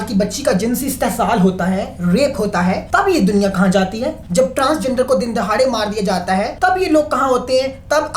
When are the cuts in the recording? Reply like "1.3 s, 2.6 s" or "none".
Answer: 2.8 s, 4.2 s, 6.5 s